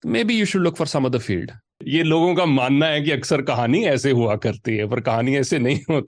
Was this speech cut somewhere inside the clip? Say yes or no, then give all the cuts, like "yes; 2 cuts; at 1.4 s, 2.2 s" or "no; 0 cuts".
yes; 1 cut; at 1.8 s